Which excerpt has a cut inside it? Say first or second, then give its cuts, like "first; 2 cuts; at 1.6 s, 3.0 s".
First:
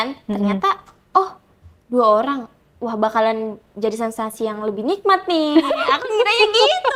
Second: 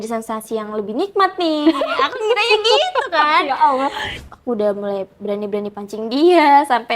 second; 1 cut; at 4.1 s